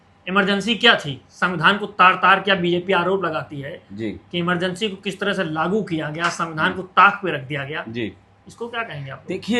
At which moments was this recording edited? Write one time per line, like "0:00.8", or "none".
none